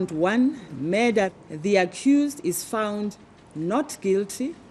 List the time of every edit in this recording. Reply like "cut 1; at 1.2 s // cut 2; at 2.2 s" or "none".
cut 1; at 1.5 s